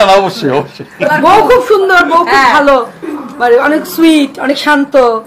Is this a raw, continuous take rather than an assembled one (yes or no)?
no